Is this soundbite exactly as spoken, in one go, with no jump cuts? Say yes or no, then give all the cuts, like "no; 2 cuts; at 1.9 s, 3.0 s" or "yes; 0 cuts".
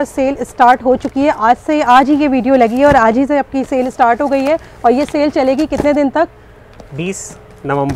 yes; 0 cuts